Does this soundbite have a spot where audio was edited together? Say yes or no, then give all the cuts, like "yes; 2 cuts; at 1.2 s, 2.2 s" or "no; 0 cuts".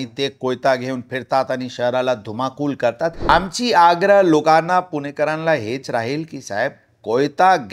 yes; 1 cut; at 3.3 s